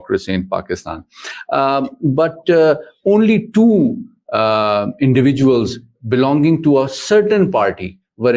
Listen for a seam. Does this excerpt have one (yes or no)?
no